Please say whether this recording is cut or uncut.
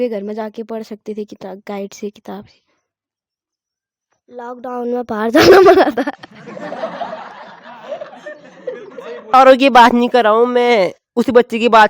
cut